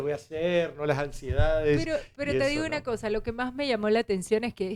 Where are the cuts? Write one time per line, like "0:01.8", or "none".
none

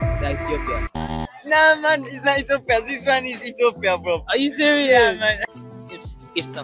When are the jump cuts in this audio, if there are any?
0:01.0
0:05.4

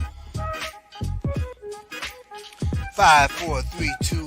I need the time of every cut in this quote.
0:01.4

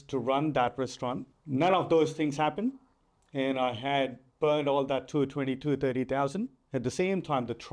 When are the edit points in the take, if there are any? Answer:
0:01.3

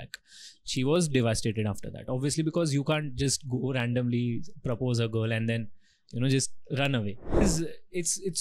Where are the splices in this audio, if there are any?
0:07.4

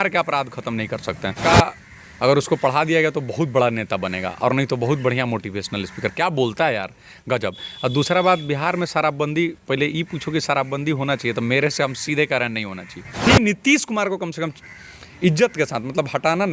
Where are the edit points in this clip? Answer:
0:01.4
0:13.2

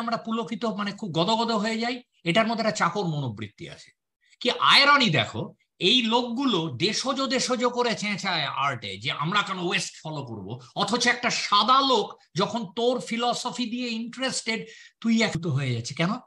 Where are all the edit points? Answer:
0:15.4

